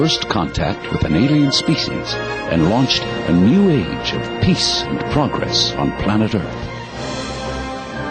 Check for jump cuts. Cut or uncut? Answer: uncut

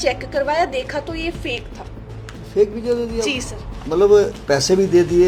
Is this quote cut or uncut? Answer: uncut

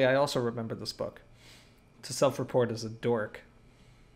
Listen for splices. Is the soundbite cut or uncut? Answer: uncut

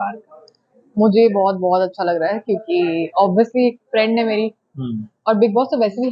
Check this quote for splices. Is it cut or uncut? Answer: uncut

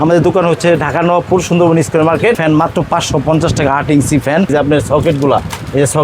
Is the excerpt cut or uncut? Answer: cut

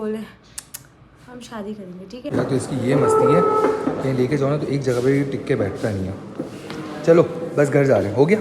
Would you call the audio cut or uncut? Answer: cut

